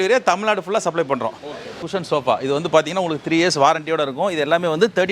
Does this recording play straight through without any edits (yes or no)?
no